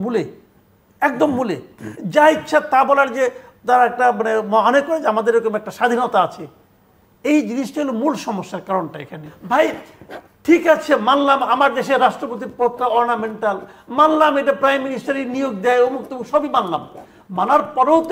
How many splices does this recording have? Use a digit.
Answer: 1